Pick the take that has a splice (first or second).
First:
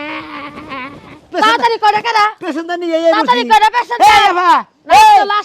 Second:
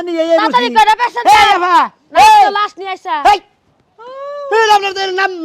first